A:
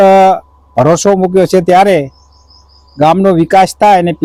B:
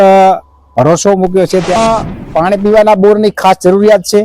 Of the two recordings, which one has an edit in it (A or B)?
B